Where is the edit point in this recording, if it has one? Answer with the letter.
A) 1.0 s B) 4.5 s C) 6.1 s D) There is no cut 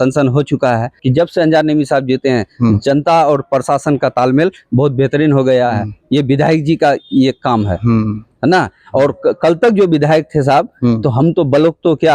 A